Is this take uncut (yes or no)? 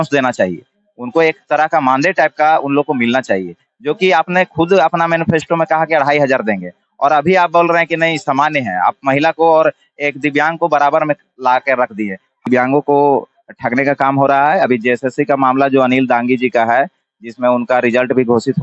no